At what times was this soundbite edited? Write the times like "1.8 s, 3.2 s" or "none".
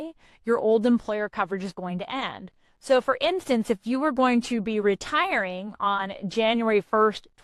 none